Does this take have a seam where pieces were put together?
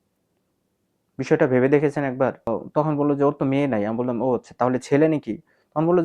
yes; 1 cut; at 2.5 s

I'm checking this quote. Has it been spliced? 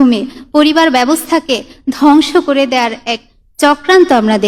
no; 0 cuts

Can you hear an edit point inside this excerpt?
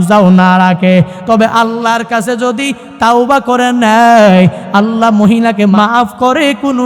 yes; 1 cut; at 5.7 s

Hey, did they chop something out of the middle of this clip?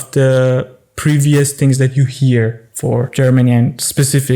yes; 1 cut; at 3.1 s

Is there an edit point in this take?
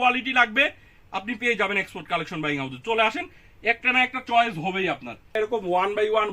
yes; 1 cut; at 5.3 s

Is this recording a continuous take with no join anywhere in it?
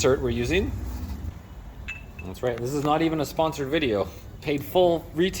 no; 1 cut; at 1.3 s

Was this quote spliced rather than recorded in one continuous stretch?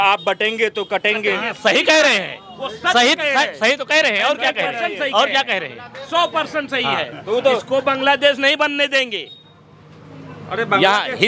no; 0 cuts

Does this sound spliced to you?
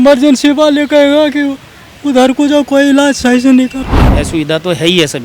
yes; 1 cut; at 4.0 s

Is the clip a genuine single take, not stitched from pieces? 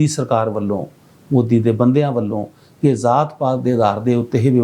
yes; 0 cuts

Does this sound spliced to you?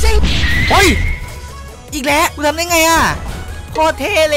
yes; 1 cut; at 2.3 s

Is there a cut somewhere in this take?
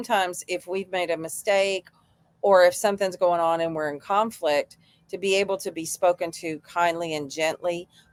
no; 0 cuts

